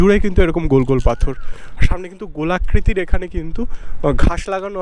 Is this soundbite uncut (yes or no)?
yes